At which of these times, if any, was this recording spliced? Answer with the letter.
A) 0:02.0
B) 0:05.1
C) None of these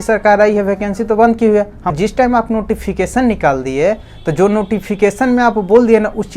A